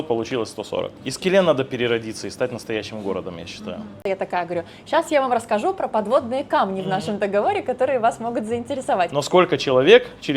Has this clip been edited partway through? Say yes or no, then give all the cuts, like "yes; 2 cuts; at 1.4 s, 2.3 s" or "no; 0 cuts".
yes; 3 cuts; at 1.0 s, 4.0 s, 9.1 s